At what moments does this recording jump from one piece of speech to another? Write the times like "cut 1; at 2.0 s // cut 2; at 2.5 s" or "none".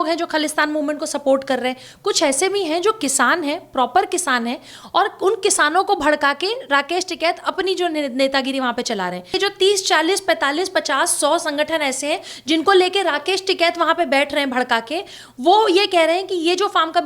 cut 1; at 9.4 s